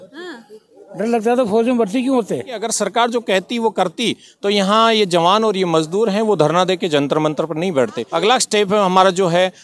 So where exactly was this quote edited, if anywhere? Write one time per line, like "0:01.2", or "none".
0:02.6
0:08.0

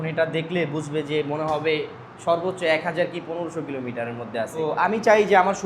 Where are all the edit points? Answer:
0:04.6

